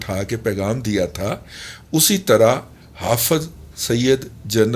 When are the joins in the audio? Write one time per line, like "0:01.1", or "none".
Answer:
none